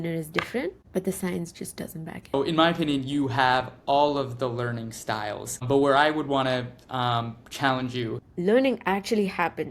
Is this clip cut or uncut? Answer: cut